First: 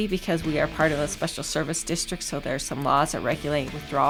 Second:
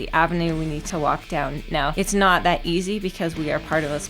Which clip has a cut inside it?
second; 2 cuts; at 0.8 s, 1.9 s

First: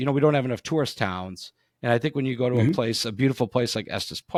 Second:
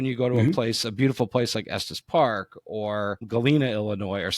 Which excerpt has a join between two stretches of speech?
second; 1 cut; at 3.2 s

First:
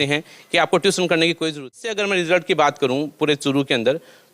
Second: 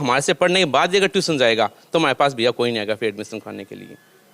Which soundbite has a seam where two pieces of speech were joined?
first; 1 cut; at 1.8 s

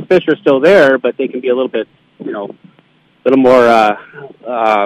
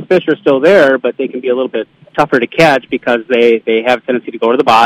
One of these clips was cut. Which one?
second; 1 cut; at 2.0 s

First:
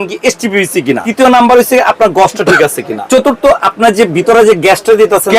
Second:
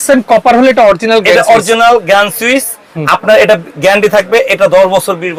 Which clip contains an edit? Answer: first; 2 cuts; at 1.0 s, 3.0 s

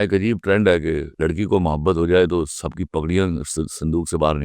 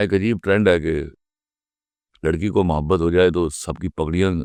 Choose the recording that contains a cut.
first; 1 cut; at 1.1 s

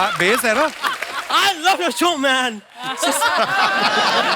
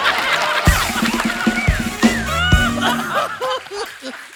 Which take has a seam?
first; 1 cut; at 1.1 s

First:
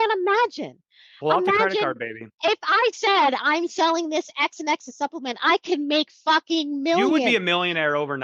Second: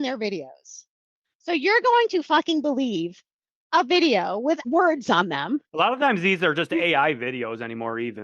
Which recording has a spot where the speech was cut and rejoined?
second; 1 cut; at 4.6 s

